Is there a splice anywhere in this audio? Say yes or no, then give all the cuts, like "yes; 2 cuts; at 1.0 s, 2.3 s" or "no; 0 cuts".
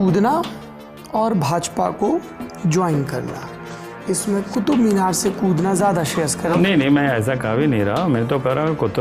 yes; 1 cut; at 6.5 s